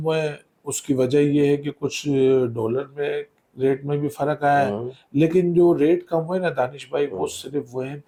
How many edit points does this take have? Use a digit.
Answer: 0